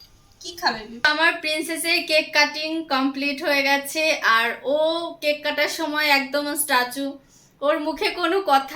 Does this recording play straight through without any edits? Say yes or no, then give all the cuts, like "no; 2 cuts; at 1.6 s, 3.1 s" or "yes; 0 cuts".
no; 1 cut; at 1.1 s